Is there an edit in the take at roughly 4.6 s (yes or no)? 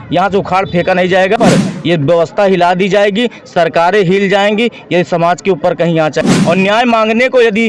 no